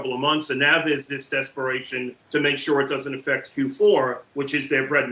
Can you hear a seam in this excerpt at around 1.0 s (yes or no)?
no